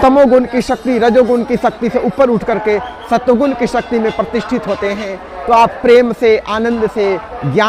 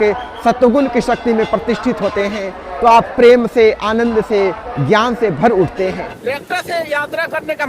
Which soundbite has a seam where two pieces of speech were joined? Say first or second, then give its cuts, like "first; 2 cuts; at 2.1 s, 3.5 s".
second; 1 cut; at 6.1 s